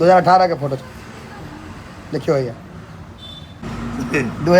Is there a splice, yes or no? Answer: yes